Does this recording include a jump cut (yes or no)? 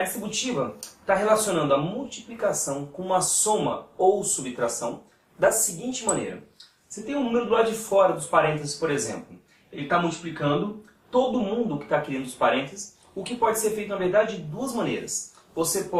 no